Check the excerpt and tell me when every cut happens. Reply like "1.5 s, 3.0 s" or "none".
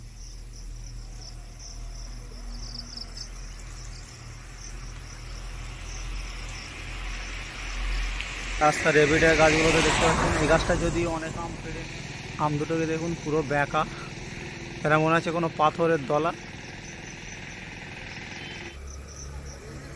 none